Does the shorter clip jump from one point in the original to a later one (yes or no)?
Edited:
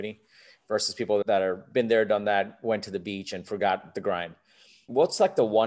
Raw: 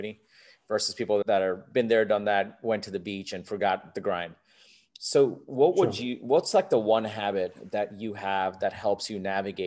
yes